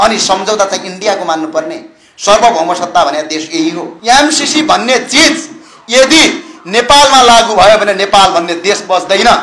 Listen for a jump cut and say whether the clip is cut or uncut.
cut